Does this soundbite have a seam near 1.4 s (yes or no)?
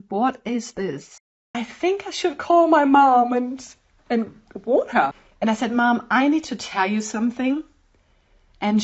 yes